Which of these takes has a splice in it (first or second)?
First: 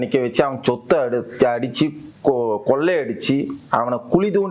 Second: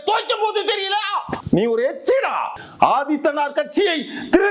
second